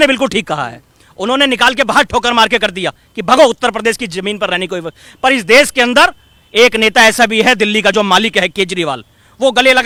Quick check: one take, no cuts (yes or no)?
yes